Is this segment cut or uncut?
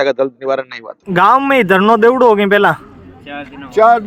cut